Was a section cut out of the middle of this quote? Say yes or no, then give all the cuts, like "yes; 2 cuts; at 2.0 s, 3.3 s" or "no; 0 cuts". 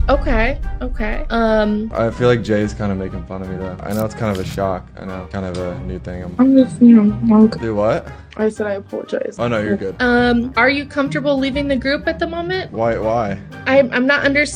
no; 0 cuts